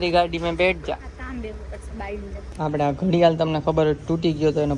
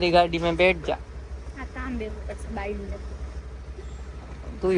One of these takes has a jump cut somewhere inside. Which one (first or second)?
first